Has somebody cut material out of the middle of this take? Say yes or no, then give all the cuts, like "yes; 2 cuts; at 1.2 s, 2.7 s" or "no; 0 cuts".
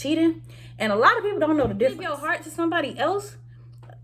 yes; 1 cut; at 2.4 s